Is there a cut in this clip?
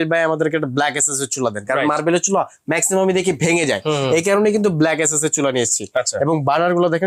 no; 0 cuts

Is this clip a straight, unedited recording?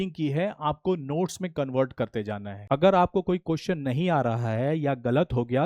no; 1 cut; at 2.6 s

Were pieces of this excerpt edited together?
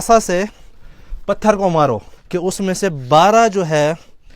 yes; 1 cut; at 2.1 s

